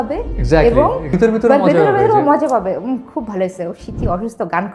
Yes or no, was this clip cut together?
yes